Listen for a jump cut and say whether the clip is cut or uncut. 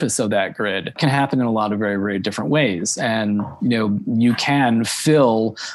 cut